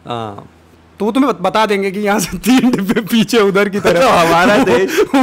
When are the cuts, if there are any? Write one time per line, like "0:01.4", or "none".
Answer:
none